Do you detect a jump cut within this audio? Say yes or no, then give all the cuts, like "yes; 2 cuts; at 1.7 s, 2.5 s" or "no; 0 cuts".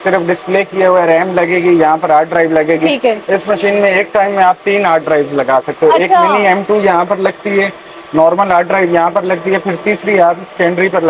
no; 0 cuts